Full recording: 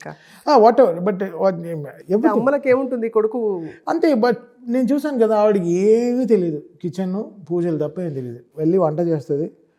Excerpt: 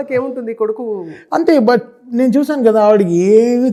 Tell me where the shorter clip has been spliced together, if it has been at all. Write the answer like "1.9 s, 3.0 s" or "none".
none